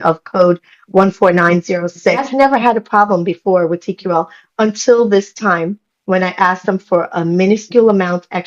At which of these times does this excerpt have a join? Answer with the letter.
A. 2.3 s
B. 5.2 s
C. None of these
A